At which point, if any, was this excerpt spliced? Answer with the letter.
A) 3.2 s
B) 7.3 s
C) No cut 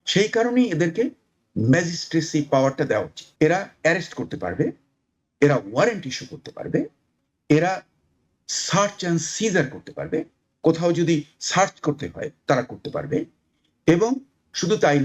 A